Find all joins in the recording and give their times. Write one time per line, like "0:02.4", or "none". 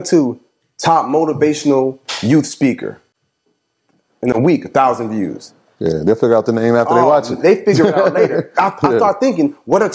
none